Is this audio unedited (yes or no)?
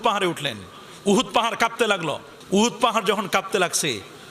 no